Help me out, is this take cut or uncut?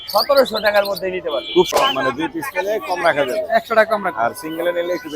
cut